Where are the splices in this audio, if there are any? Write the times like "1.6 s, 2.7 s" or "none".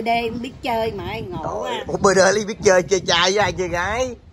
none